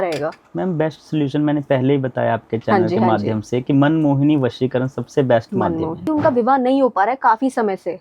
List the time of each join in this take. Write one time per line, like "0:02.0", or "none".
0:06.0